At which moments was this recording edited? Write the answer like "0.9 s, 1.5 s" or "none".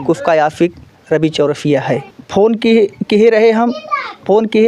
2.2 s